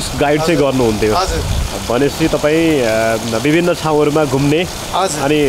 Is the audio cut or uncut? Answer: uncut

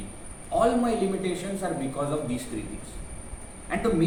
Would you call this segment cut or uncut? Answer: uncut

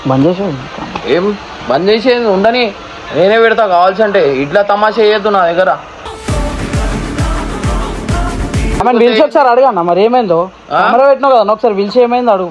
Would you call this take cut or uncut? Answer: cut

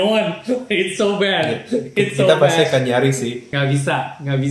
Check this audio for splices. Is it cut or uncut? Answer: cut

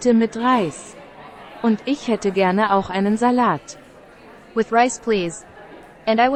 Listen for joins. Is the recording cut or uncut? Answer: uncut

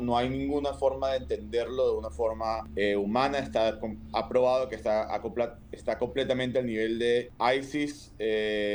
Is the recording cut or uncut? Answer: cut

